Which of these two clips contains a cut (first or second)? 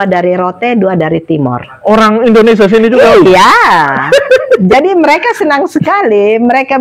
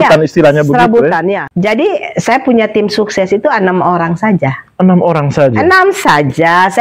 second